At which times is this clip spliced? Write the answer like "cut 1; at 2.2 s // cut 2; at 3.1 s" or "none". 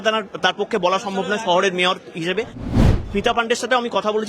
cut 1; at 2.9 s